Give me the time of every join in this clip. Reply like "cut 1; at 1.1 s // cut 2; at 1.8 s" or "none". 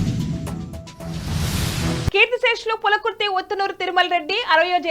cut 1; at 2.1 s